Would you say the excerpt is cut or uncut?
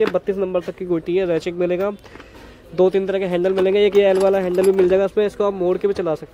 uncut